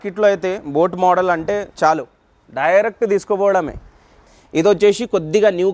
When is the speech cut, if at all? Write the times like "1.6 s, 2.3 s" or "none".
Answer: 4.2 s